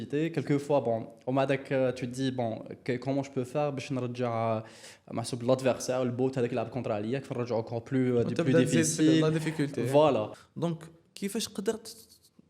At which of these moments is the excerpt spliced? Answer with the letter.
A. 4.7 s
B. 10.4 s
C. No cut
B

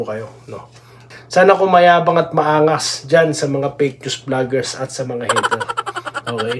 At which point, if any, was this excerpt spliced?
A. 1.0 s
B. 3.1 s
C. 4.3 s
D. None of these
A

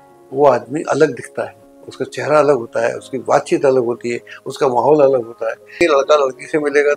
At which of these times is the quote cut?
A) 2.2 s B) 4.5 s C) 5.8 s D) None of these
C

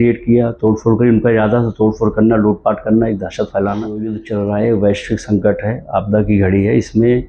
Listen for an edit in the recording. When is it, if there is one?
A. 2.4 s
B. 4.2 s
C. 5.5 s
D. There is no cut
B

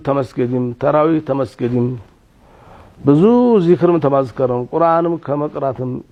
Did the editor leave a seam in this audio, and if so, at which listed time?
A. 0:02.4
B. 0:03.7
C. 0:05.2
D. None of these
D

